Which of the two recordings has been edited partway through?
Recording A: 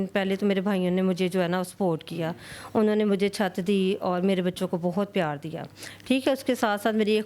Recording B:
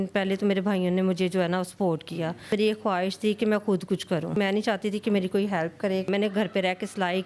B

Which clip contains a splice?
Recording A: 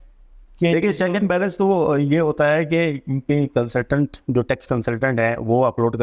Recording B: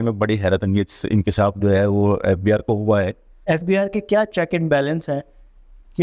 B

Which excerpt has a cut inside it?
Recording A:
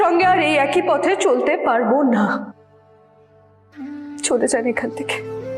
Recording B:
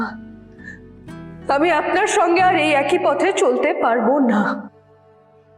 B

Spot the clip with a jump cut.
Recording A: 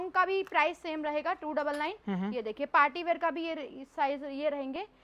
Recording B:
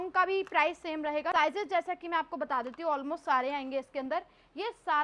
B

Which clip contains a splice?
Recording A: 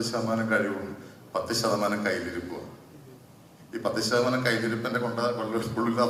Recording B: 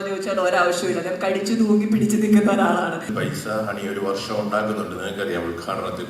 B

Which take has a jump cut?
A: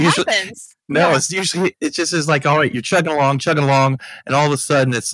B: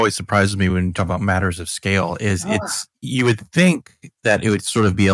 A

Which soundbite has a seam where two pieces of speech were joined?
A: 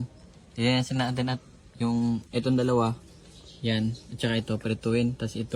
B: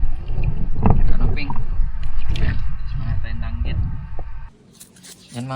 B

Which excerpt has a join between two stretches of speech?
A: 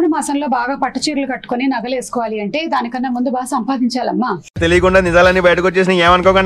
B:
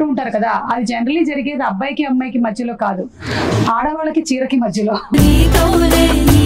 B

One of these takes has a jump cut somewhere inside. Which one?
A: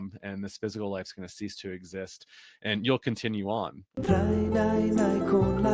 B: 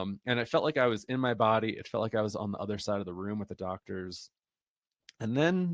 A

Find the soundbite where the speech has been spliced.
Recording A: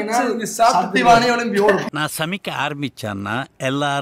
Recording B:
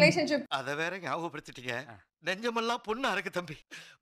A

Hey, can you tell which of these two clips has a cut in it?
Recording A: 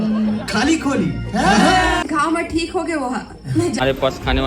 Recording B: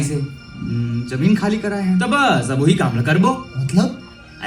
A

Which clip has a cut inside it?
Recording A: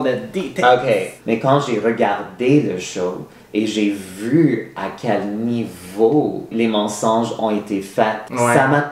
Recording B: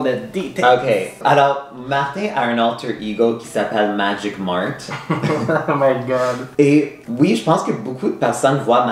A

